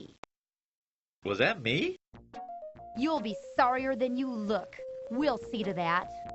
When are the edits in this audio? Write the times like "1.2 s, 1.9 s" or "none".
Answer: 1.6 s

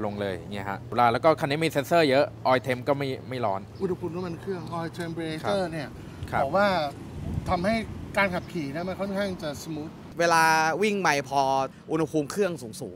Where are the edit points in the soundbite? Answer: 0.9 s, 3.7 s, 10.0 s, 11.8 s

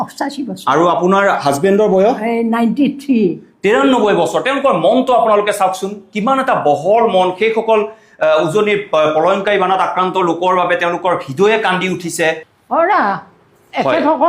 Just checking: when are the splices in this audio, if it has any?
12.5 s

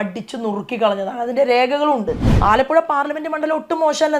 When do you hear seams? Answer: 2.2 s

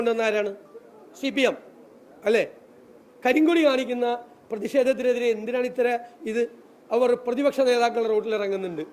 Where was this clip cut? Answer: none

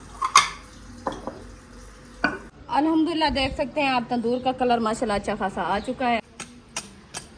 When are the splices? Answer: 2.5 s, 6.2 s

